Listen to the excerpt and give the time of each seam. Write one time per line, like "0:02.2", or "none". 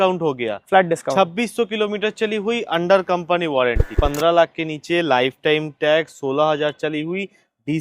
0:03.9